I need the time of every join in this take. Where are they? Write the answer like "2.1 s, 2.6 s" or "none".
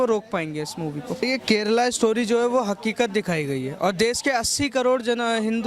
1.2 s